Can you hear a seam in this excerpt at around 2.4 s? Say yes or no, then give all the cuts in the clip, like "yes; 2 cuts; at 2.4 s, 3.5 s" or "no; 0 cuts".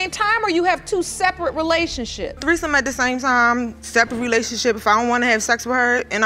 yes; 1 cut; at 2.4 s